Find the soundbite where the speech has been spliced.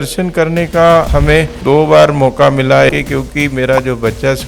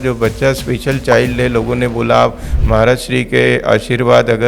first; 2 cuts; at 1.1 s, 2.9 s

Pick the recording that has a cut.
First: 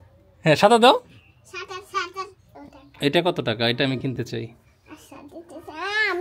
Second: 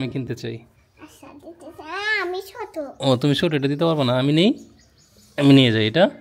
first; 1 cut; at 2.5 s

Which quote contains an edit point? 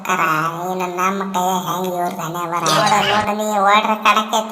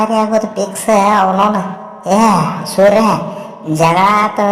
first; 1 cut; at 2.9 s

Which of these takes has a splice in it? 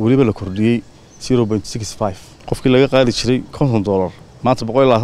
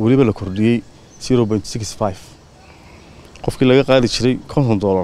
first; 1 cut; at 2.3 s

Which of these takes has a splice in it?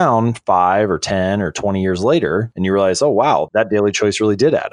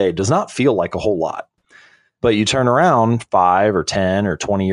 second; 1 cut; at 1.5 s

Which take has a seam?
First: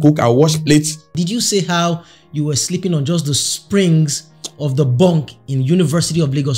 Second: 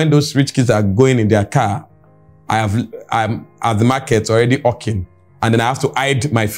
first; 1 cut; at 1.1 s

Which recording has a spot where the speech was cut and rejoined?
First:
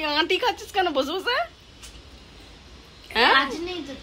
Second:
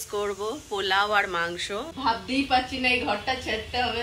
second; 1 cut; at 1.9 s

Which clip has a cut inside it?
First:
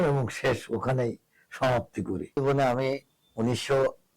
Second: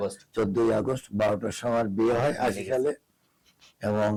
first; 1 cut; at 2.3 s

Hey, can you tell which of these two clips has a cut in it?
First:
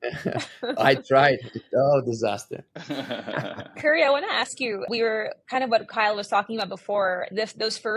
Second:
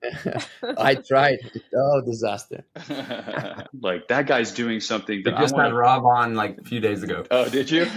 second; 1 cut; at 3.7 s

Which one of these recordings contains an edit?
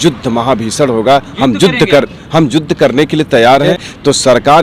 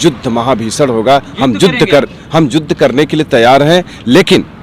first; 1 cut; at 3.7 s

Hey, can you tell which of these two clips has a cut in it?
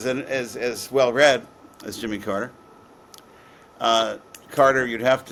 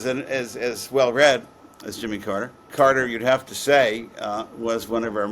second; 1 cut; at 2.6 s

